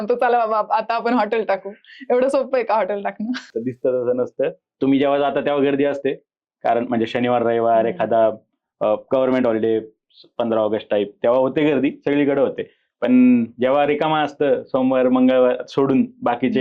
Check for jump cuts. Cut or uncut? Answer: cut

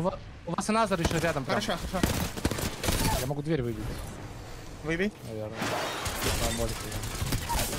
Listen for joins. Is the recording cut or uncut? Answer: cut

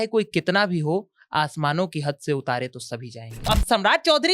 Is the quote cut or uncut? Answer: cut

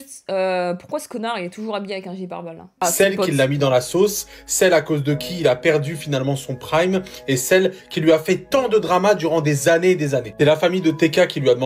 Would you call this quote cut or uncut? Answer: cut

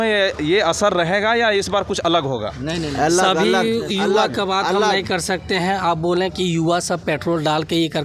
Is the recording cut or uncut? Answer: uncut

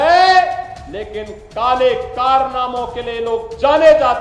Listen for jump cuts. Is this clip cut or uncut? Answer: uncut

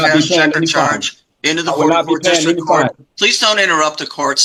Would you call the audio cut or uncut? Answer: uncut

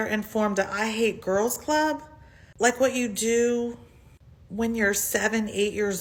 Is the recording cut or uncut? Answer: uncut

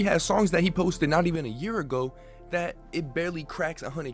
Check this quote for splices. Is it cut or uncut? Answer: uncut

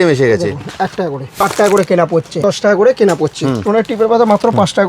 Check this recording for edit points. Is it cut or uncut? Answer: cut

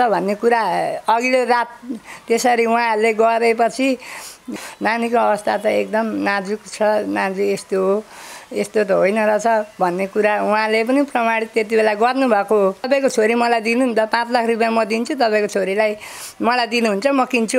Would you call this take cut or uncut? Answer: cut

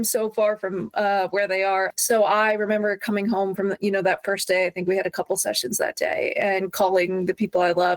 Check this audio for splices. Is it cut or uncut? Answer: cut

